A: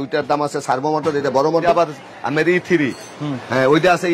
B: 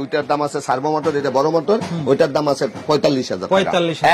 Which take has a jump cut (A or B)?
A